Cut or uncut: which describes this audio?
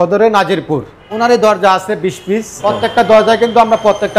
cut